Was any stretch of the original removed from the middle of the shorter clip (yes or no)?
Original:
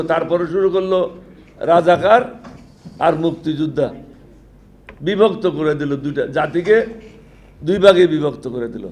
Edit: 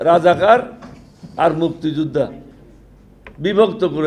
no